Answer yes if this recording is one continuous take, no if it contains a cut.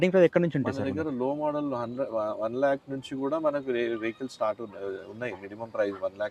yes